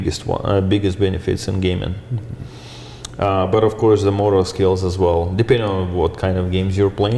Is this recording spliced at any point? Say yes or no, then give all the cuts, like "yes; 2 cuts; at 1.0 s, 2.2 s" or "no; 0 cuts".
no; 0 cuts